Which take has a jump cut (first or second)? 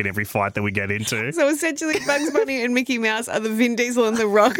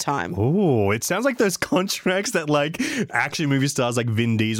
first